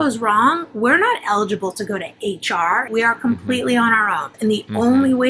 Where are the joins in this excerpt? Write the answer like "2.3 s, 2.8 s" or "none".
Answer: 2.9 s, 4.3 s